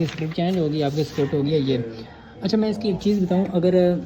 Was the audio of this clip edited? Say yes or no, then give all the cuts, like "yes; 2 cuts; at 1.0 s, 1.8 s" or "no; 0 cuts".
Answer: no; 0 cuts